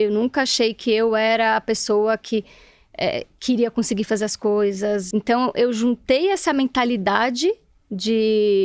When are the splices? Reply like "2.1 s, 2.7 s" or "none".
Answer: 5.0 s